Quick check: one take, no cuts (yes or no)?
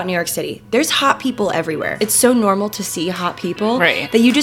no